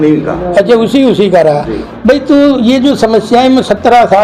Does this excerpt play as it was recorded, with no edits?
yes; 0 cuts

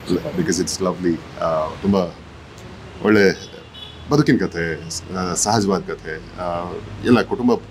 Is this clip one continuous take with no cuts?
yes; 0 cuts

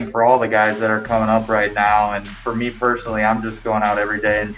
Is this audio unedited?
no; 1 cut; at 2.3 s

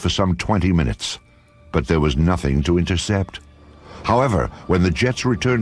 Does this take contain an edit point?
yes; 1 cut; at 1.8 s

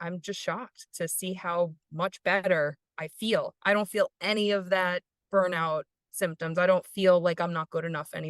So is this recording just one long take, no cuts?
no; 1 cut; at 0.9 s

